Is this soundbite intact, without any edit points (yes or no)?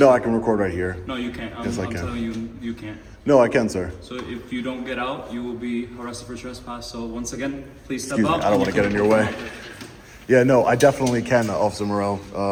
yes